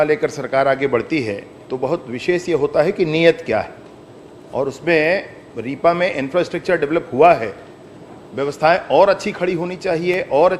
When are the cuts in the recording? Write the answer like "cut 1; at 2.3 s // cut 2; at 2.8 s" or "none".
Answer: none